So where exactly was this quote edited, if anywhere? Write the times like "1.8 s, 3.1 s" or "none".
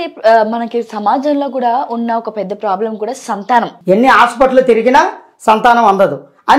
3.7 s